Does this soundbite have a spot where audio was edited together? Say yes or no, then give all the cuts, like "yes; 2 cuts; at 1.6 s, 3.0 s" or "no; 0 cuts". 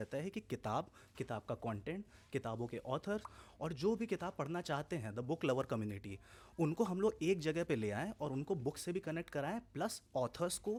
no; 0 cuts